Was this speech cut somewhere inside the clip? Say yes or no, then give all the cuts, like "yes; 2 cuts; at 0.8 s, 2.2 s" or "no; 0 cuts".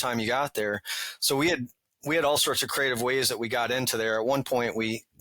no; 0 cuts